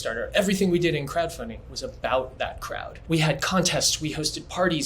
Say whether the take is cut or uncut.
cut